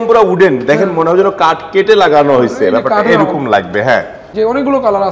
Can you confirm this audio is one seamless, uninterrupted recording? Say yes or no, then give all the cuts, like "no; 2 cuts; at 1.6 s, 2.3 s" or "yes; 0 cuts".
no; 1 cut; at 4.2 s